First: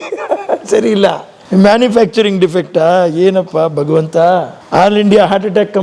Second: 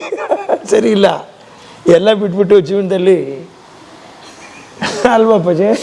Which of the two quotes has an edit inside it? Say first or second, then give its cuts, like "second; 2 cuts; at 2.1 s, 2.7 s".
first; 2 cuts; at 1.3 s, 4.6 s